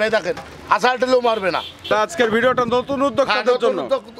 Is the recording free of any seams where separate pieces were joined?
no; 1 cut; at 1.9 s

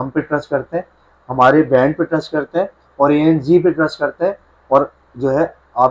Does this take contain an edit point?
no; 0 cuts

